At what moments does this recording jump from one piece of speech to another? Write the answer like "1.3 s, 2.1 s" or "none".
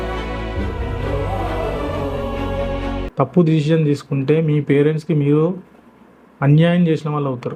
3.0 s